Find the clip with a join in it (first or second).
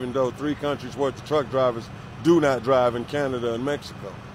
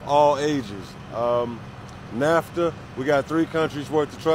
second